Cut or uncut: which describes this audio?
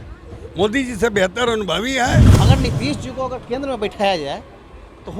cut